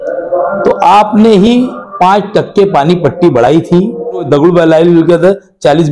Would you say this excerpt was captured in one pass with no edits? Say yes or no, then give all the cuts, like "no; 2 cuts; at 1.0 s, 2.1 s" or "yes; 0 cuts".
no; 1 cut; at 4.2 s